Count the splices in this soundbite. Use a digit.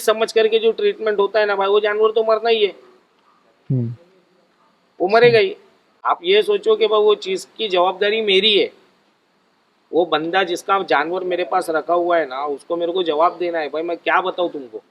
0